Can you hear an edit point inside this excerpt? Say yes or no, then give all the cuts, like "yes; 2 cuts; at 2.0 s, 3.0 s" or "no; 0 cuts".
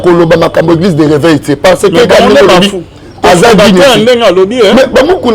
no; 0 cuts